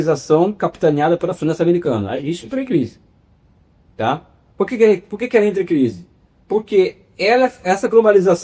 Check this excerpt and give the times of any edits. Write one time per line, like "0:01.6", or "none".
none